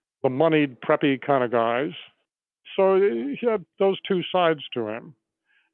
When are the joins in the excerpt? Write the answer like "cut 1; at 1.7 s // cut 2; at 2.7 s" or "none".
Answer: cut 1; at 2.6 s